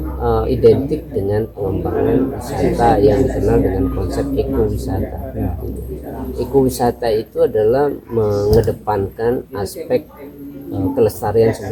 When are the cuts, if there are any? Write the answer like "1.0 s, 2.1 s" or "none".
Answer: none